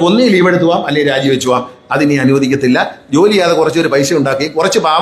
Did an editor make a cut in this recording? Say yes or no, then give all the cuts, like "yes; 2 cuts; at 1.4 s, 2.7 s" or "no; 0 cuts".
no; 0 cuts